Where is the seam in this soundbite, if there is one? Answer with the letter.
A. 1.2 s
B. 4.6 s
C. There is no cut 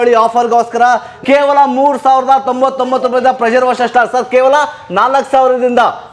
A